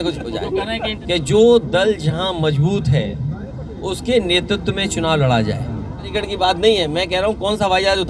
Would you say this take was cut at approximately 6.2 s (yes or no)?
yes